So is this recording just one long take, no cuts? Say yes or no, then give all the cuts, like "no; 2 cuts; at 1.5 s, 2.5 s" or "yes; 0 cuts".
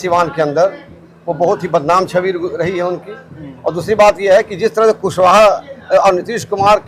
yes; 0 cuts